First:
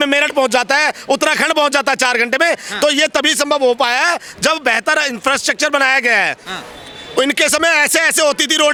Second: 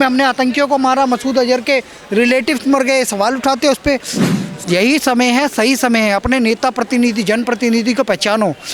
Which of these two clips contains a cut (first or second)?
second